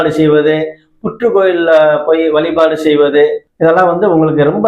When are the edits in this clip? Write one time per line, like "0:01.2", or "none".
0:03.5